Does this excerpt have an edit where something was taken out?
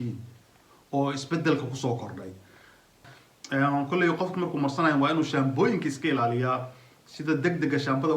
yes; 1 cut; at 3.0 s

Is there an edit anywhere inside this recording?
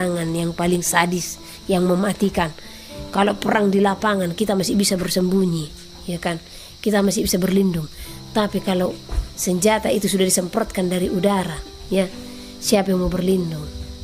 no; 0 cuts

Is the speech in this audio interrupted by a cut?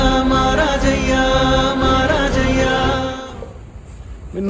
no; 0 cuts

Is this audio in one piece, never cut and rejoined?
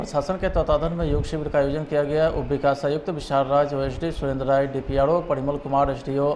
yes; 0 cuts

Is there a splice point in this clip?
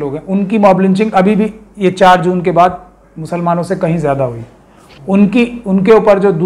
no; 0 cuts

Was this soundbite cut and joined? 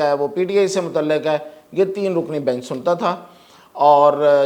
no; 0 cuts

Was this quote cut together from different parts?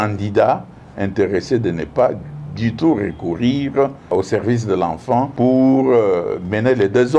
yes; 2 cuts; at 4.1 s, 5.3 s

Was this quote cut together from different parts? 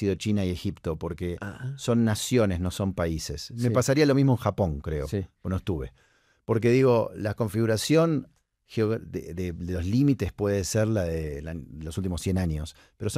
no; 0 cuts

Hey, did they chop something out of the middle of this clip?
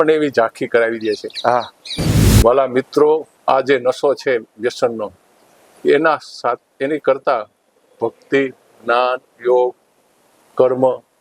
yes; 1 cut; at 2.0 s

